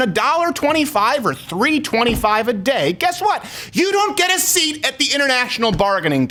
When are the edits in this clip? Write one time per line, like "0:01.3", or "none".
none